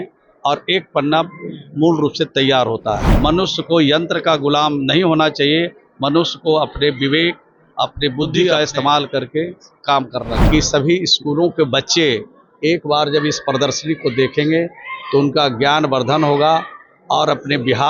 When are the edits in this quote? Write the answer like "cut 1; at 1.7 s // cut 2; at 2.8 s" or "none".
cut 1; at 3.1 s // cut 2; at 8.5 s // cut 3; at 10.4 s